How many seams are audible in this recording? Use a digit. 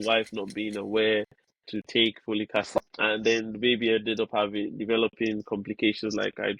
1